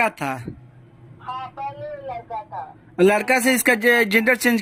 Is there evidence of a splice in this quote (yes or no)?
no